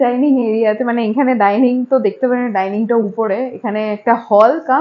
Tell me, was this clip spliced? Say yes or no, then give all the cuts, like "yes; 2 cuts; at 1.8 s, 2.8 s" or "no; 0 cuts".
no; 0 cuts